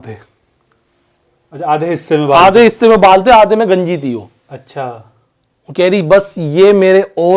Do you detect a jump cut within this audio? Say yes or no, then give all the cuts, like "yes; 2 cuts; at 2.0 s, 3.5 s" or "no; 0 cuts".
no; 0 cuts